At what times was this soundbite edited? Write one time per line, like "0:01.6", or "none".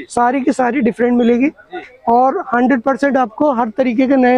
none

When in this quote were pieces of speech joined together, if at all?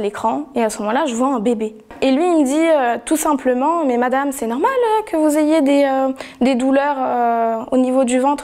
0:01.8

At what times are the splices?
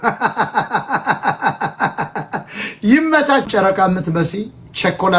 0:03.5

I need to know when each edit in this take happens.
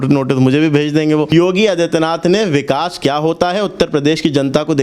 0:01.3

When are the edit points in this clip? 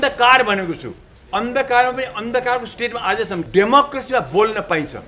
0:03.5

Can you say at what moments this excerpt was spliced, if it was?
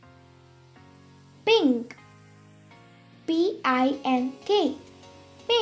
0:01.4

